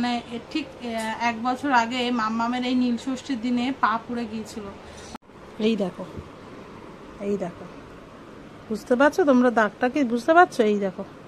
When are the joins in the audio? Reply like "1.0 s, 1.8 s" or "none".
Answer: 5.1 s